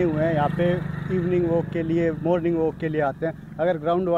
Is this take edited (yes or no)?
no